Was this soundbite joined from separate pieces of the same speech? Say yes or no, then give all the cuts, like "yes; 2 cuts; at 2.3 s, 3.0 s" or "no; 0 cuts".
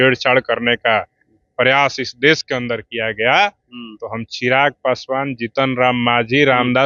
no; 0 cuts